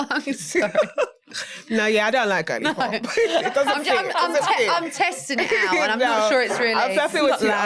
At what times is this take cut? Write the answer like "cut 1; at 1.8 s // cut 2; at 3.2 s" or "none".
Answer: none